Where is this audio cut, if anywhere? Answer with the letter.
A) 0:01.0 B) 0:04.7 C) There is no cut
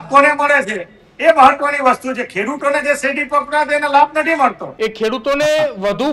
B